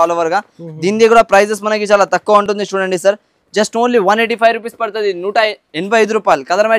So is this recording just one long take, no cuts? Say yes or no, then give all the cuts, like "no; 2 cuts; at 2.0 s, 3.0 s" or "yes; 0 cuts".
yes; 0 cuts